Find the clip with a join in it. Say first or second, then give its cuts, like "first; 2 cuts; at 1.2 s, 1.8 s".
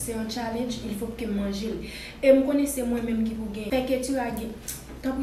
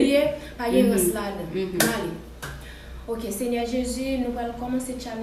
first; 1 cut; at 3.6 s